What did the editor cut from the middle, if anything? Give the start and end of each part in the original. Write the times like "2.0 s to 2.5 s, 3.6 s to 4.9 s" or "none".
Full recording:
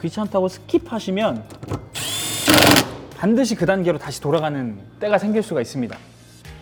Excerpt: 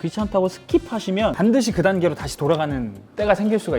1.3 s to 3.2 s